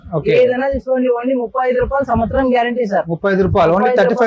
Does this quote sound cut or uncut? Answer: uncut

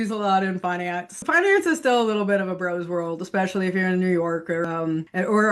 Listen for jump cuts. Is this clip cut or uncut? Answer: cut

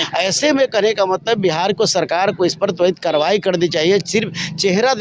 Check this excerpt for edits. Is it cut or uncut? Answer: uncut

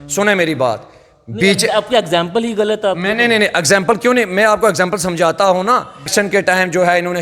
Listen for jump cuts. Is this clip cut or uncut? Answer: cut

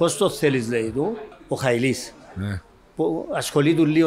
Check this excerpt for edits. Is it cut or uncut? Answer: cut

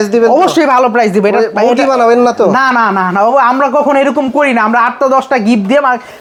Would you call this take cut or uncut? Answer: uncut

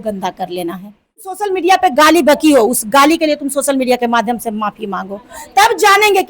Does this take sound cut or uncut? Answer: cut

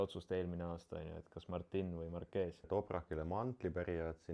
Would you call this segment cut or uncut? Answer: cut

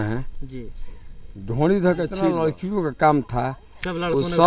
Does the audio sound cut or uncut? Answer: cut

